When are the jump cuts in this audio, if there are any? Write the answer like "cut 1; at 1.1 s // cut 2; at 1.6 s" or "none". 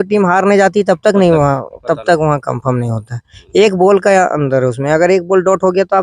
none